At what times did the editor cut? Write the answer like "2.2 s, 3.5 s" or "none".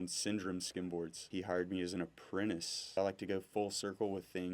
1.2 s, 3.0 s